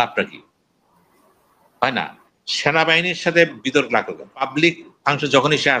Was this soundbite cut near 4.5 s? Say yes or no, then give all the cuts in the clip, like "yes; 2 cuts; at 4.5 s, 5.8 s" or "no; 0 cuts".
yes; 1 cut; at 4.5 s